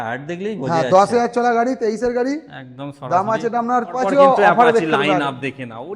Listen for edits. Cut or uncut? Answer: cut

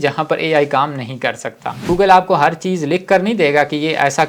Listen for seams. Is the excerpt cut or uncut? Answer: cut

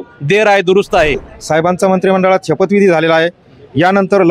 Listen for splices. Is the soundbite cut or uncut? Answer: cut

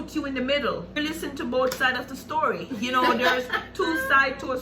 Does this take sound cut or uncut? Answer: cut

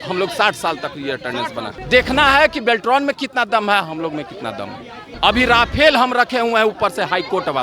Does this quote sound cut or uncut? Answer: cut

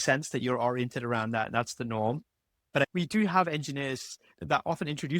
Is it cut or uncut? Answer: cut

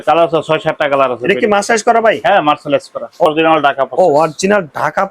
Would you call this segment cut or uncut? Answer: cut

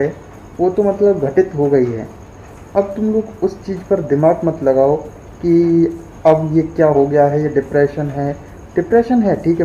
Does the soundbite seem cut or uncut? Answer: uncut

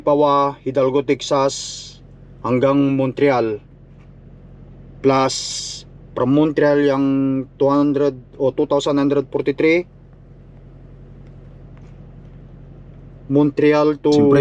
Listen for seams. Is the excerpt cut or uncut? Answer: uncut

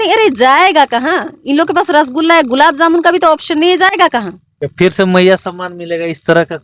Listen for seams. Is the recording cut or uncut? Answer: uncut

